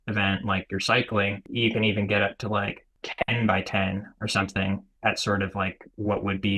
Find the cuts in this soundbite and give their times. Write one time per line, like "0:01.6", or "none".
0:01.4
0:03.0
0:04.9